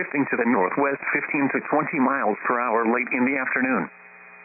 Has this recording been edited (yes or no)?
no